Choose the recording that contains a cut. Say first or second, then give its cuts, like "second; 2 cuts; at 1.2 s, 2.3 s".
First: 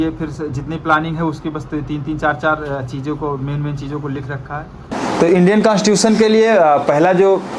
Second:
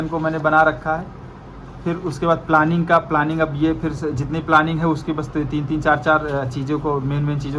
first; 1 cut; at 5.0 s